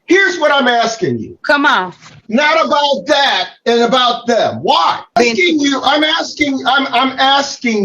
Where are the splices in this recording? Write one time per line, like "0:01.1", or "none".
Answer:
0:02.2
0:05.1